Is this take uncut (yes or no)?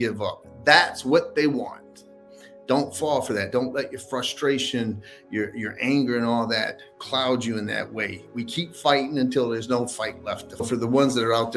no